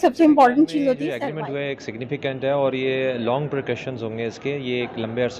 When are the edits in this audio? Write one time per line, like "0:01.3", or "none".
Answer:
0:01.0